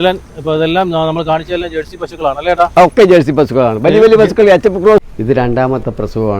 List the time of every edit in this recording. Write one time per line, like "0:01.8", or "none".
0:05.0